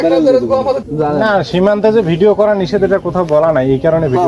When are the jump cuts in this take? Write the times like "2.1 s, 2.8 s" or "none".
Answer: none